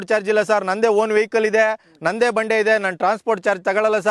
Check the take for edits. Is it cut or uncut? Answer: uncut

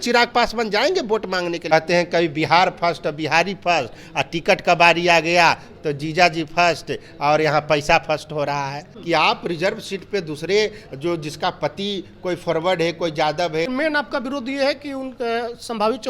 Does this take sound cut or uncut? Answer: cut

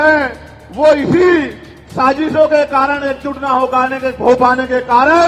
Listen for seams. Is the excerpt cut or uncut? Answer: uncut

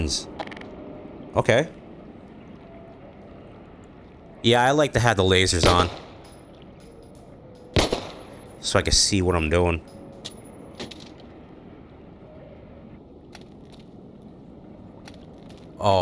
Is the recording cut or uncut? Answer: cut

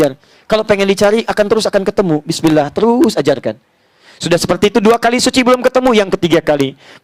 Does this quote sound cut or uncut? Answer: uncut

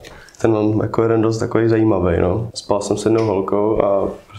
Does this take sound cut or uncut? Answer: cut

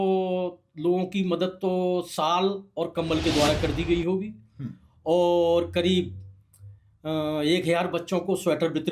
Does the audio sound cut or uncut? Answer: uncut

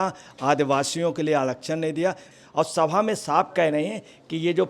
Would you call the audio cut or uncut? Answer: cut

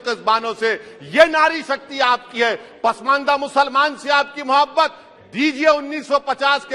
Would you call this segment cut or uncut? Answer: uncut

